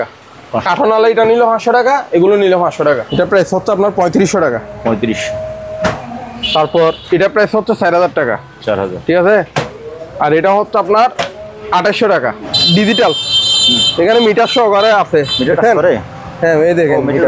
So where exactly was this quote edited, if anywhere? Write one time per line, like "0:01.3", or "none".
0:03.0
0:12.5